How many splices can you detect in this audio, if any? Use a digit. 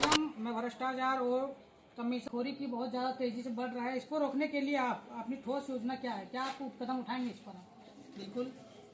1